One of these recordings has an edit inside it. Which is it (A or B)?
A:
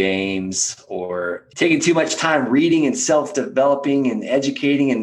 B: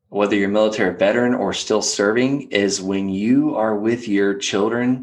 A